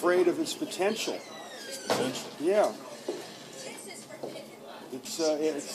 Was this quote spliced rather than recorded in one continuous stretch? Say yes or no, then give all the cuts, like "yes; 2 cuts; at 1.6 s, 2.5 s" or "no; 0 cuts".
no; 0 cuts